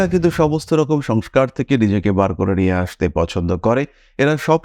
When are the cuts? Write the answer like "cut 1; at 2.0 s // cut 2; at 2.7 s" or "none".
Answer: none

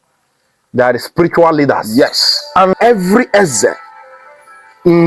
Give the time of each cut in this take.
cut 1; at 2.7 s

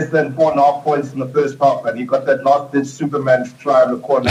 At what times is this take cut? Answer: none

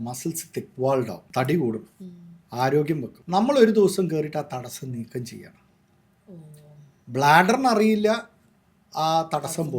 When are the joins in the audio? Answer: cut 1; at 1.2 s // cut 2; at 3.1 s

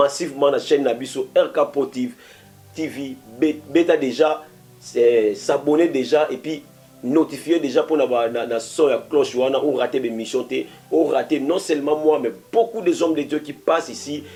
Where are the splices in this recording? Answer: none

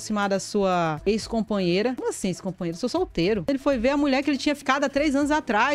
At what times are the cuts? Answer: cut 1; at 3.4 s

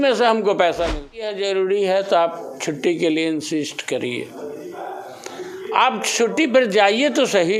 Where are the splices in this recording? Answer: cut 1; at 1.4 s

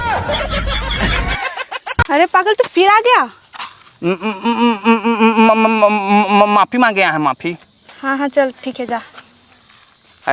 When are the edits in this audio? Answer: cut 1; at 1.9 s

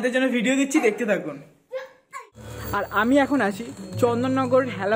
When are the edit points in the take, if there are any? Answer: cut 1; at 2.1 s

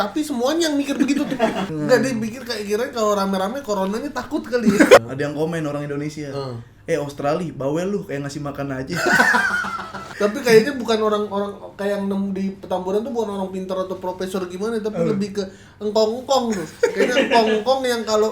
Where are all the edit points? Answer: cut 1; at 1.6 s // cut 2; at 5.0 s // cut 3; at 10.1 s

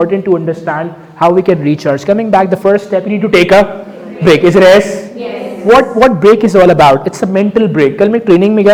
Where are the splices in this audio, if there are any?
none

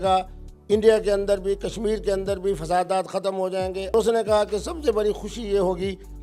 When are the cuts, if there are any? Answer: cut 1; at 3.9 s

